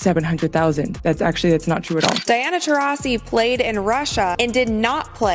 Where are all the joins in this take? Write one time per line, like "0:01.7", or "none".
0:02.2